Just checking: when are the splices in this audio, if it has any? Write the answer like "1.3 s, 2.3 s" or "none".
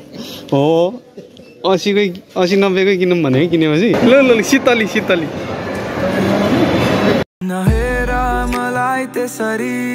4.0 s